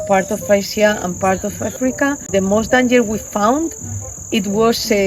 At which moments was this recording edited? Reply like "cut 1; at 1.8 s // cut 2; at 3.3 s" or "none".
cut 1; at 2.3 s